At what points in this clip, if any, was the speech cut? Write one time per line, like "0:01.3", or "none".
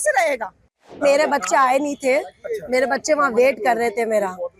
0:01.0